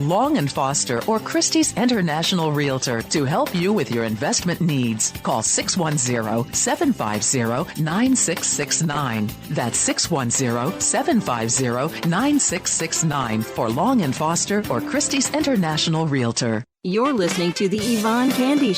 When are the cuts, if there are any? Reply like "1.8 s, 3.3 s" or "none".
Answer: 16.7 s